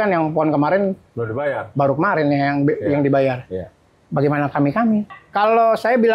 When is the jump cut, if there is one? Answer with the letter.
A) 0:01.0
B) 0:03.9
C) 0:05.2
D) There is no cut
C